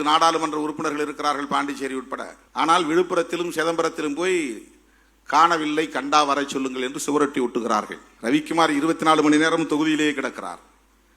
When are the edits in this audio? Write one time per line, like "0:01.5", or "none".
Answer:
0:02.4
0:08.0